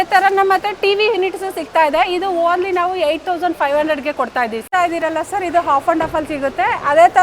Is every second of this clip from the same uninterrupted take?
no; 1 cut; at 4.6 s

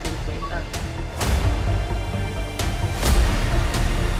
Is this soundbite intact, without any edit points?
yes; 0 cuts

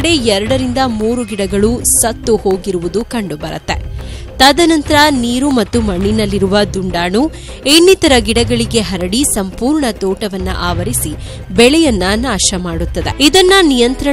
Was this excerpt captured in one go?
no; 1 cut; at 13.1 s

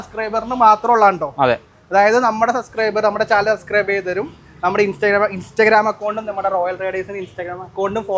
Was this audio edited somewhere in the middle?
no; 0 cuts

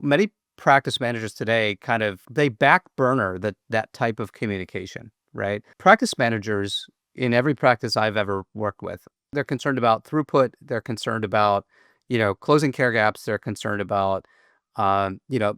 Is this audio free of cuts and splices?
no; 3 cuts; at 2.2 s, 5.7 s, 9.2 s

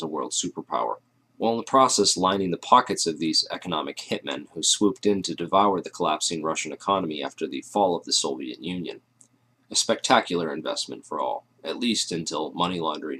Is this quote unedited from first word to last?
no; 1 cut; at 11.8 s

